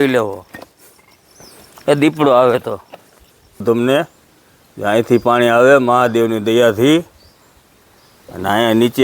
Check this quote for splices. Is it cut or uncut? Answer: cut